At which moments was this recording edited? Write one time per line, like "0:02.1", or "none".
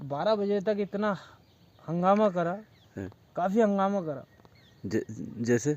none